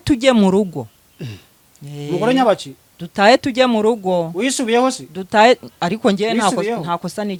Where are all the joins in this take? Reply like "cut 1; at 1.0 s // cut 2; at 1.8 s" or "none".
none